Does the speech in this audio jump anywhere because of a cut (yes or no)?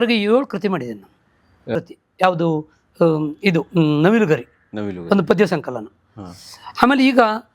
yes